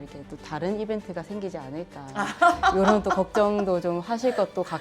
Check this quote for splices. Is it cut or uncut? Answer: uncut